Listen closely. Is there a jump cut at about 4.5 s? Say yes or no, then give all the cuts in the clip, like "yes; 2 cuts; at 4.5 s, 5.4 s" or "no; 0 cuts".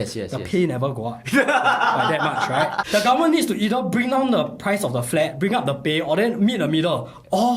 no; 1 cut; at 2.8 s